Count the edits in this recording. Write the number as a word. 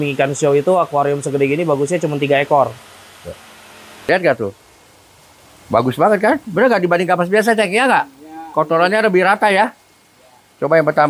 one